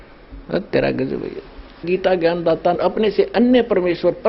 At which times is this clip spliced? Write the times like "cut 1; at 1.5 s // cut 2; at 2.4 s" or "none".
cut 1; at 1.8 s // cut 2; at 2.8 s